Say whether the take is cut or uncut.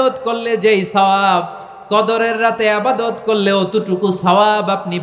uncut